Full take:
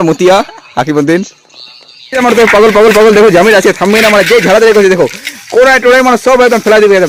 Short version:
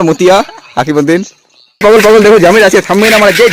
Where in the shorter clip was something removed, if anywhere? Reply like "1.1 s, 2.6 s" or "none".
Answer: 1.8 s